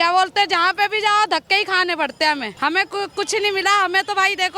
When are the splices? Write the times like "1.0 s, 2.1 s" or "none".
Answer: 2.5 s